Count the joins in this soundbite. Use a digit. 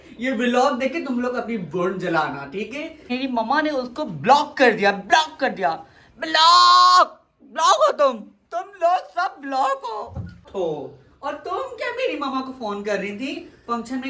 2